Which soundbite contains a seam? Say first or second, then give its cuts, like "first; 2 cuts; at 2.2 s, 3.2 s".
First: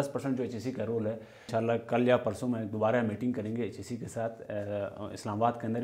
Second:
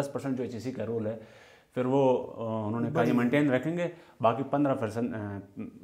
first; 1 cut; at 1.5 s